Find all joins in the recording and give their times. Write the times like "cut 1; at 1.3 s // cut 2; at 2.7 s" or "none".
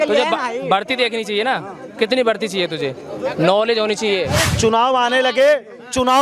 cut 1; at 4.4 s